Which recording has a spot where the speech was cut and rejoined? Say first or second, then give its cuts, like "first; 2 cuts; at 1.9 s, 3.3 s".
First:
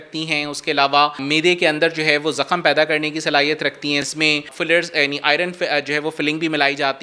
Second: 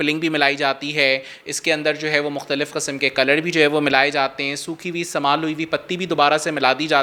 first; 2 cuts; at 1.2 s, 4.1 s